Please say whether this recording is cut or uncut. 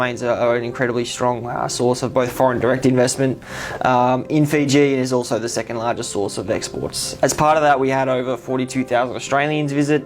cut